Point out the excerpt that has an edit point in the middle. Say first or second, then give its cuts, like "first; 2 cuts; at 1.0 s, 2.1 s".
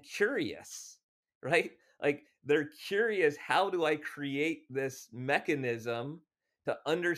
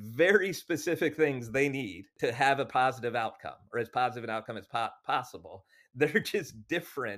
second; 1 cut; at 2.1 s